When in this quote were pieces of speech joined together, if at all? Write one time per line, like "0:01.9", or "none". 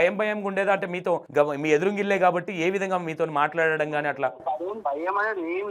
0:01.3
0:04.8